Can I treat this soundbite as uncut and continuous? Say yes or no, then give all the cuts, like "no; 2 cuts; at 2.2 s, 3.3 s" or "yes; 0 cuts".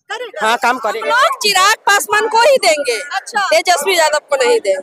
no; 1 cut; at 1.0 s